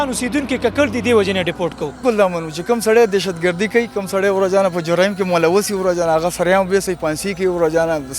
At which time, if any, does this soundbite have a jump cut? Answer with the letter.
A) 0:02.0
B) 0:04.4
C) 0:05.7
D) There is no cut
A